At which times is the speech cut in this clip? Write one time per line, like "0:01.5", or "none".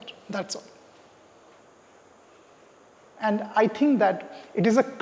0:01.6

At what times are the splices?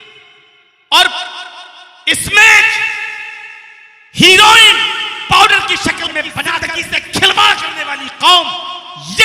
0:06.7

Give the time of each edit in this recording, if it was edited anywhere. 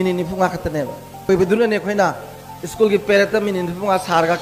0:01.3

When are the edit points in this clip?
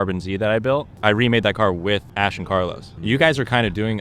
0:00.9
0:02.5

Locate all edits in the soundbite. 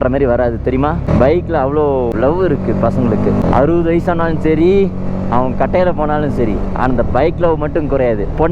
0:01.1
0:02.1
0:03.4

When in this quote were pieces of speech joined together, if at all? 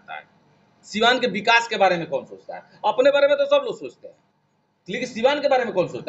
none

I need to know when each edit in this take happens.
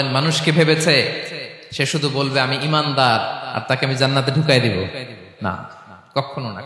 none

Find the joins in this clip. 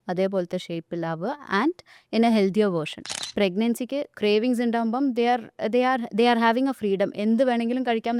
0:03.2

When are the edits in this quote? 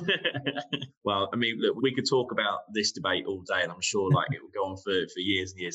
0:00.9
0:01.8

